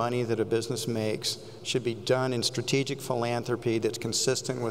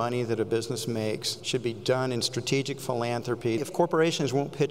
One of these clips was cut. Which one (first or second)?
second